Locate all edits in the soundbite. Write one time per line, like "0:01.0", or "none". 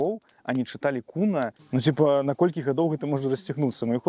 0:01.6